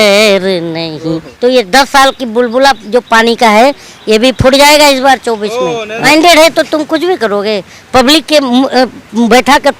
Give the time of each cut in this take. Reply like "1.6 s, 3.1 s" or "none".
1.3 s, 5.9 s